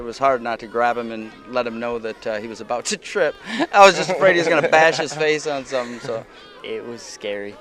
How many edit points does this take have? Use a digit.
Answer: 1